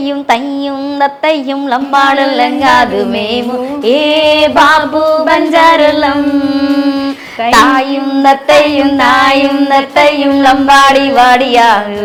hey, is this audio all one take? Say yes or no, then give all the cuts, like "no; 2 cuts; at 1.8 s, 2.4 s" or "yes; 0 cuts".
yes; 0 cuts